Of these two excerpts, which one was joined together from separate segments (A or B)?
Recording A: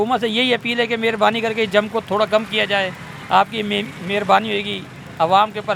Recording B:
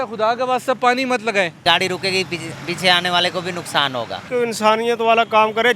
B